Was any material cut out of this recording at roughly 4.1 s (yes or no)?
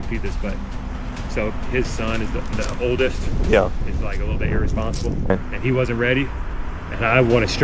no